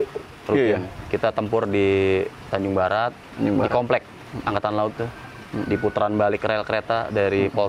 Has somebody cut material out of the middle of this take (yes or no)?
no